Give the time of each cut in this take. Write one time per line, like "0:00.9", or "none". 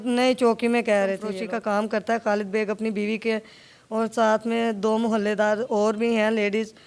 0:01.3

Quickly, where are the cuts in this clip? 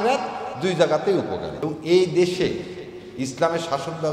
0:01.6

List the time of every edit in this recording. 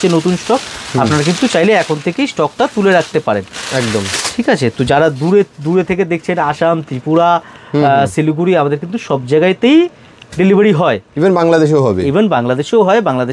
none

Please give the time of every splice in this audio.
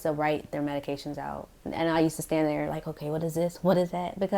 0:01.5

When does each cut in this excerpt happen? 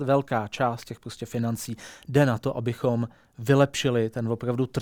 none

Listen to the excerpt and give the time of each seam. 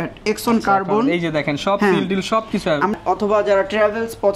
0:02.9

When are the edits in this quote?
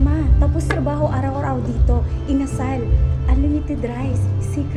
none

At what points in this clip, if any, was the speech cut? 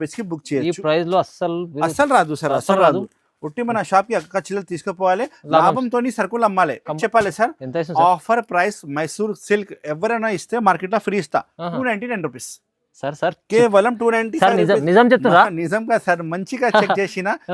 0:07.0

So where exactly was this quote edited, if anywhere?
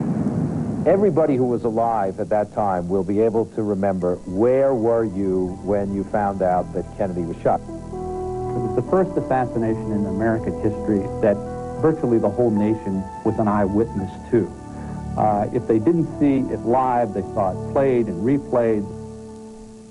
0:15.6

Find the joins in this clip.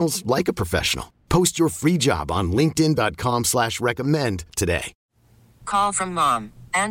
0:05.0

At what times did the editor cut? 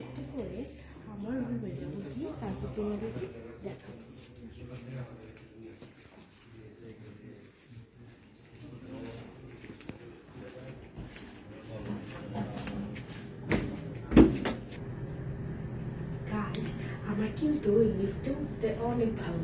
0:14.6

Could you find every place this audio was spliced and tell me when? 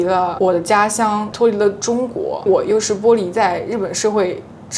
0:01.3
0:02.4

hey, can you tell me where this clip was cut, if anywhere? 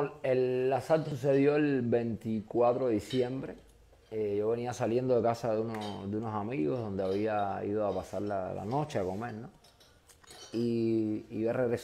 0:01.1

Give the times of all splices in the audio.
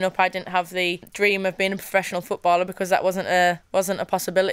0:01.0

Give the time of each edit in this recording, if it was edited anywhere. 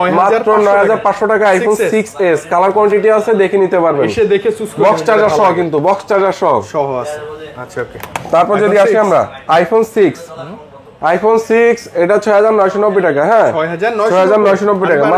none

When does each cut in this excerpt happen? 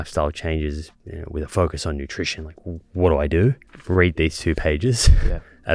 0:03.7

